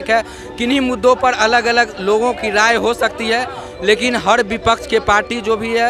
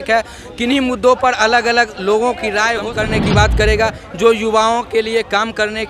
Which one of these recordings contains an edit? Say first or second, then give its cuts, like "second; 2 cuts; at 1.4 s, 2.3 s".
second; 1 cut; at 2.9 s